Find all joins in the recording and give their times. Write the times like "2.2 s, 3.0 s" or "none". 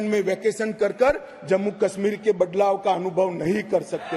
none